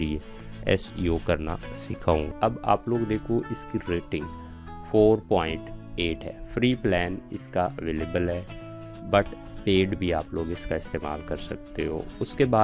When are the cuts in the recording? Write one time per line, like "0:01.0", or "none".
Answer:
0:02.3